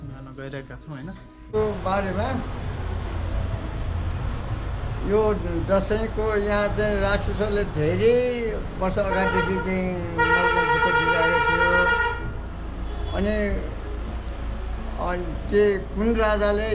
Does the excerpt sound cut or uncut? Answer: cut